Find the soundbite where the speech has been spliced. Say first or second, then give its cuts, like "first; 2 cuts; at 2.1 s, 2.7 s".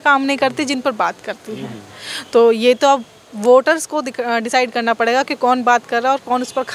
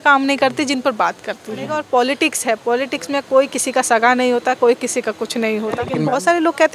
second; 2 cuts; at 1.8 s, 5.9 s